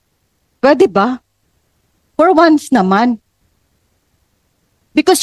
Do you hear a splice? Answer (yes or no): no